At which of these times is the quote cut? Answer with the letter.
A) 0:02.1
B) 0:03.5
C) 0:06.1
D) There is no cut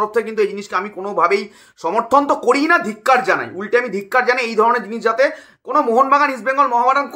D